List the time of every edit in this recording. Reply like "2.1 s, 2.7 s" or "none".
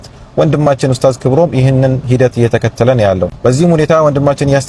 none